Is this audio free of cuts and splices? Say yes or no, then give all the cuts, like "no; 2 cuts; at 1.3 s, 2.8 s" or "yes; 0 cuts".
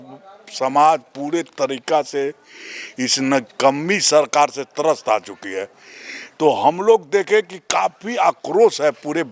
yes; 0 cuts